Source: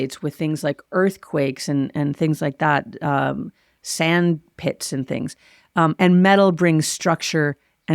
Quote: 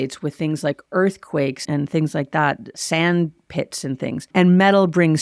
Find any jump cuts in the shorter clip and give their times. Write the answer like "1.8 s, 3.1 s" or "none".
1.6 s, 2.7 s, 4.3 s